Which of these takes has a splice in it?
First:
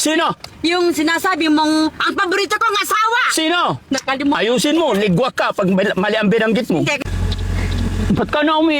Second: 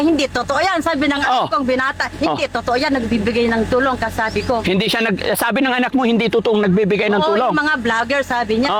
first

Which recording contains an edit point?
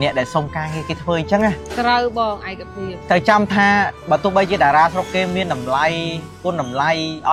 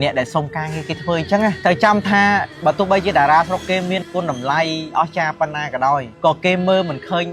second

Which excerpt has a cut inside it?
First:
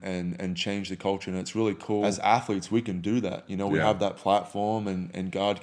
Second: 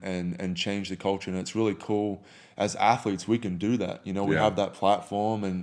first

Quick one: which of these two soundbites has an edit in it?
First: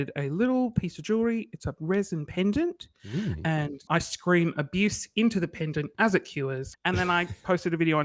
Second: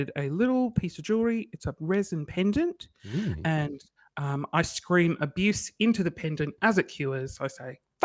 first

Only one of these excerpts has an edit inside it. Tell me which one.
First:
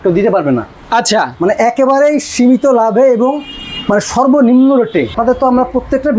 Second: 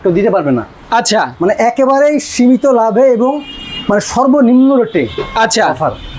first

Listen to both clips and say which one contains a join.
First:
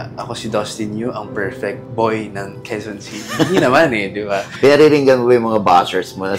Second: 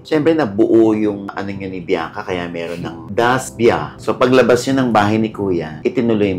second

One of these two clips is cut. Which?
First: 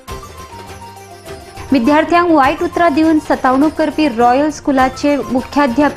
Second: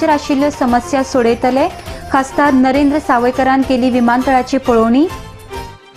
first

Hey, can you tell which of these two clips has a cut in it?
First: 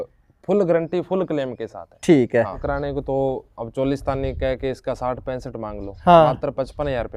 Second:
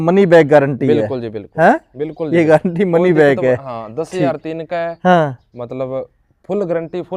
first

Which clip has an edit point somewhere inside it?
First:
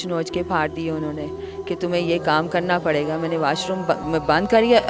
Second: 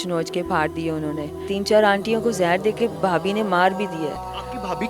second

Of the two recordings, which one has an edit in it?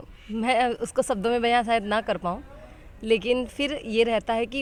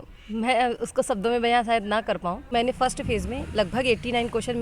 second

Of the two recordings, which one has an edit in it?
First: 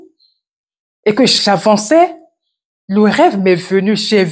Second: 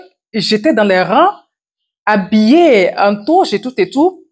first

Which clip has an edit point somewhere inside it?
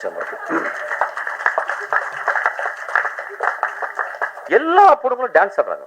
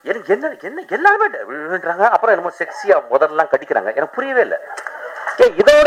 first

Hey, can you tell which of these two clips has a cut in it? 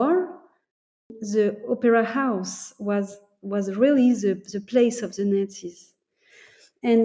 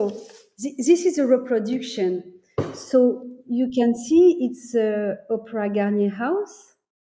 first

